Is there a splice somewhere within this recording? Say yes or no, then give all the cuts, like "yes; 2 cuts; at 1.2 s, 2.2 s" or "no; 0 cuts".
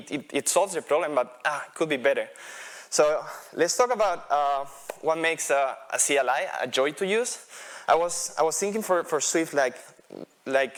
no; 0 cuts